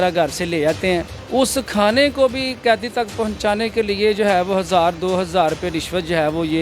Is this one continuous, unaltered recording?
no; 1 cut; at 1.2 s

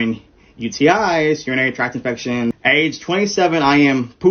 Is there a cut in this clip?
yes; 1 cut; at 2.6 s

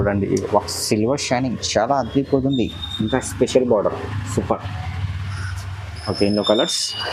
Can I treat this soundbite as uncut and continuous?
yes; 0 cuts

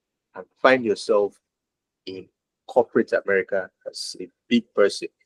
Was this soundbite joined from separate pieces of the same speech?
no; 0 cuts

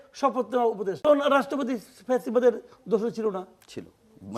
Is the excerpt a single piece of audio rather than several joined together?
no; 1 cut; at 1.0 s

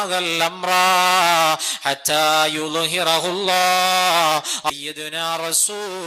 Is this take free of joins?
no; 1 cut; at 4.7 s

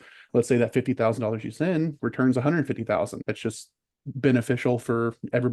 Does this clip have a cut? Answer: yes; 2 cuts; at 2.0 s, 3.2 s

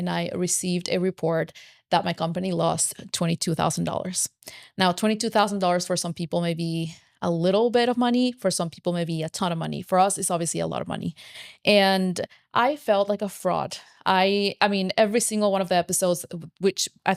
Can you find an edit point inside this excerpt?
no; 0 cuts

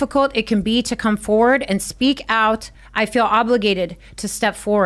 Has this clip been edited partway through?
yes; 1 cut; at 2.8 s

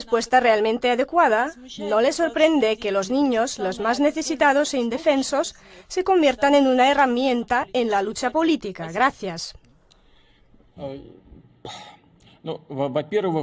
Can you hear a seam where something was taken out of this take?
no; 0 cuts

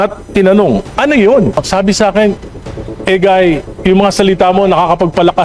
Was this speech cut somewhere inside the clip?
yes; 1 cut; at 1.6 s

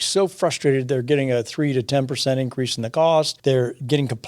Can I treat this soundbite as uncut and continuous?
no; 1 cut; at 3.3 s

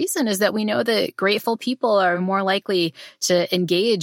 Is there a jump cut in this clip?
yes; 1 cut; at 2.2 s

